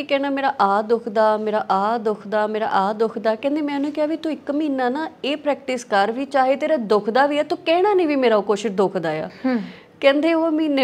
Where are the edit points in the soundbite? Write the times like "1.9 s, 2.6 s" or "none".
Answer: none